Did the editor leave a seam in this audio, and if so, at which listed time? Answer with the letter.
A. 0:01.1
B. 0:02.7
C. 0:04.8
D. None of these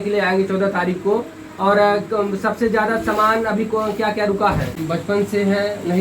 C